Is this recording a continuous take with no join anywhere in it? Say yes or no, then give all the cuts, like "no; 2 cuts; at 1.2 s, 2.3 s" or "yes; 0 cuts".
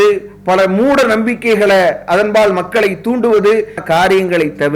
no; 1 cut; at 3.8 s